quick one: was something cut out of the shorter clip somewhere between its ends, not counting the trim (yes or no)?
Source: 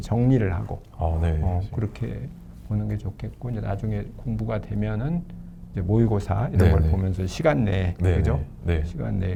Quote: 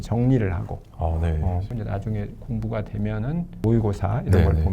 yes